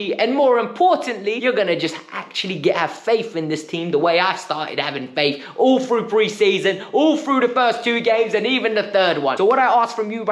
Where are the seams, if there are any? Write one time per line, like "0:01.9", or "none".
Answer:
0:01.4
0:09.3